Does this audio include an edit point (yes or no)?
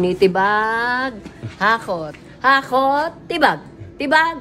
no